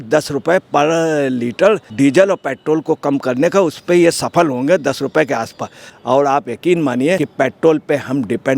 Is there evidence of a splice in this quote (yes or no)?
yes